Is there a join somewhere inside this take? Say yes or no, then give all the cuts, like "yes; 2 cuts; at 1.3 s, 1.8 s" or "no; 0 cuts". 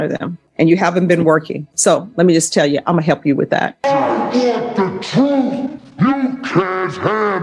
yes; 1 cut; at 3.8 s